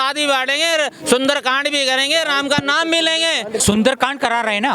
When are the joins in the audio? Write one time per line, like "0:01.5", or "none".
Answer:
0:03.6